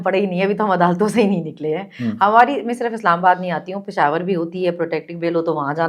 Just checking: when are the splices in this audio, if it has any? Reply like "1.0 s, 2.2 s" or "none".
none